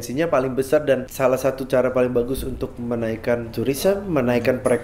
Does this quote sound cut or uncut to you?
cut